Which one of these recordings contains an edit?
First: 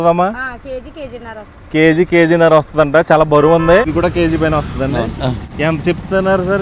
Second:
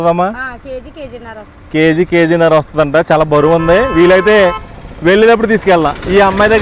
first; 2 cuts; at 3.9 s, 5.4 s

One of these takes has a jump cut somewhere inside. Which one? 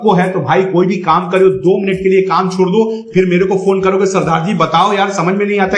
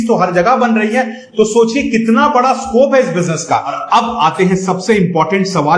second; 1 cut; at 3.8 s

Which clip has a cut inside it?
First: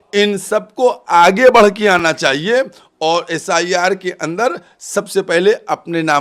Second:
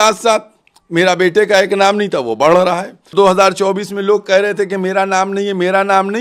second; 1 cut; at 3.1 s

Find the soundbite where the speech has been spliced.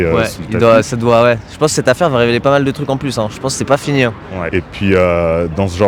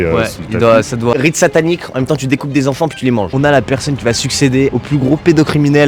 second; 3 cuts; at 1.1 s, 3.3 s, 4.7 s

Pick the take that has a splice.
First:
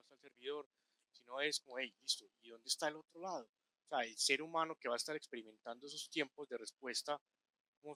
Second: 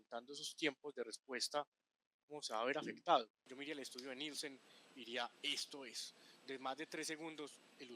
second; 1 cut; at 3.4 s

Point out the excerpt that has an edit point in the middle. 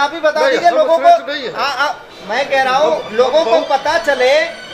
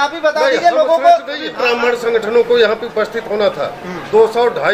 second; 1 cut; at 1.6 s

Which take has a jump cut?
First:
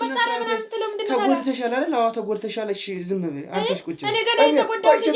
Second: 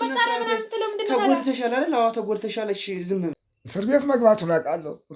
second; 1 cut; at 3.3 s

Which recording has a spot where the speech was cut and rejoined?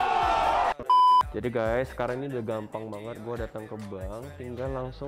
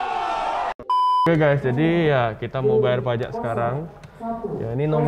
second; 1 cut; at 1.2 s

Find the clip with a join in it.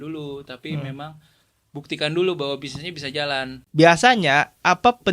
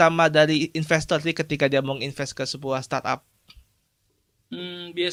first; 1 cut; at 3.6 s

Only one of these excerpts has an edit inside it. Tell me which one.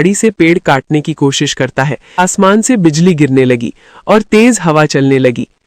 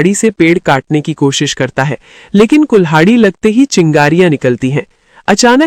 first; 1 cut; at 2.2 s

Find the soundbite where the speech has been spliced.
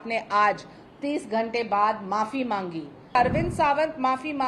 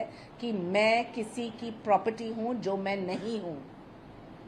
first; 1 cut; at 3.1 s

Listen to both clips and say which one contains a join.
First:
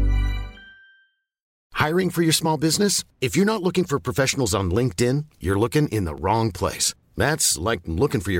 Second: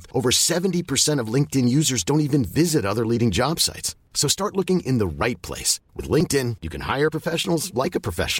first; 1 cut; at 1.5 s

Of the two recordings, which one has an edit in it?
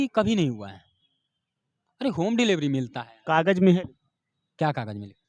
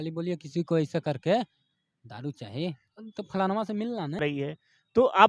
second; 1 cut; at 4.2 s

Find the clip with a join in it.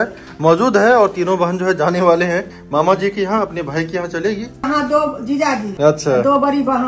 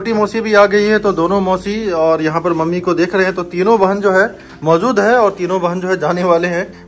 first; 2 cuts; at 4.6 s, 5.7 s

